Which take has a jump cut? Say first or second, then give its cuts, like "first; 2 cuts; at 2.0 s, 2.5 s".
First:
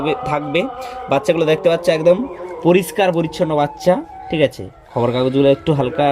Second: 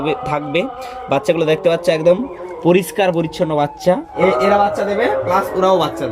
second; 1 cut; at 4.1 s